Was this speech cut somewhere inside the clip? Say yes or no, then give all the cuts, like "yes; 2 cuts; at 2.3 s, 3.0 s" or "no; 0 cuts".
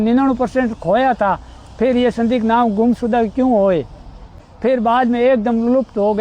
yes; 2 cuts; at 3.3 s, 4.4 s